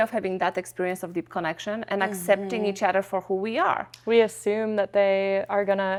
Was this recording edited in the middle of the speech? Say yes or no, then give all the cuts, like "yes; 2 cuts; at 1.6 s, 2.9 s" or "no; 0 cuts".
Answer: no; 0 cuts